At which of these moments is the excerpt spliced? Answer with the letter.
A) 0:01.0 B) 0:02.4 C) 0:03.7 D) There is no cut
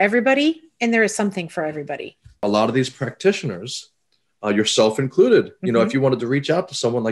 B